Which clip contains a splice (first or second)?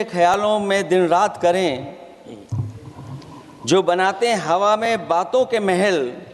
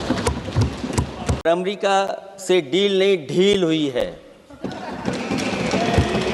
second